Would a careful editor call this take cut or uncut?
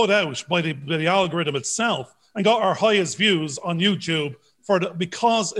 uncut